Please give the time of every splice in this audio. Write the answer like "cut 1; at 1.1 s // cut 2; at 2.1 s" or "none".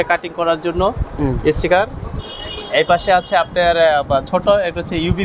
none